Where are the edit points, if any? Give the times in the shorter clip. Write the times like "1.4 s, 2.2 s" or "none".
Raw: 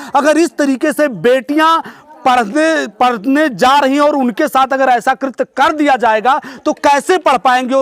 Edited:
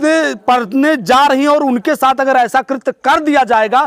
none